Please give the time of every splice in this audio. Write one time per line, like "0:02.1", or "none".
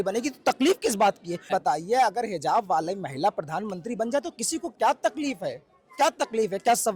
0:01.5